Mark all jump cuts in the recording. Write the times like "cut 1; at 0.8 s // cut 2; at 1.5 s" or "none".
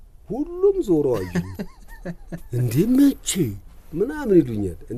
none